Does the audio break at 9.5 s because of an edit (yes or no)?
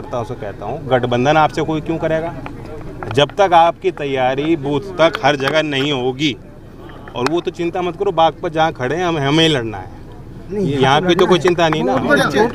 no